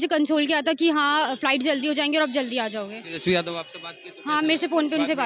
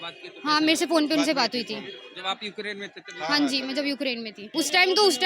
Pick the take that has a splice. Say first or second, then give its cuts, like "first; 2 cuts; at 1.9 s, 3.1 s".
second; 1 cut; at 4.4 s